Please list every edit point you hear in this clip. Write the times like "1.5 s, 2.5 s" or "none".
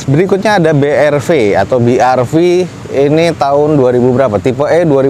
none